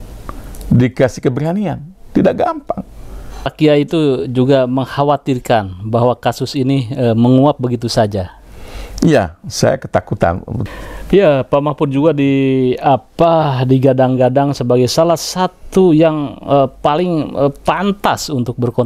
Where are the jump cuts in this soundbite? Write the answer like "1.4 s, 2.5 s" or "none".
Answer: 3.5 s, 10.5 s